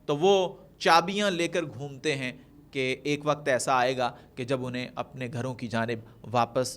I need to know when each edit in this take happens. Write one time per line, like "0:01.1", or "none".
none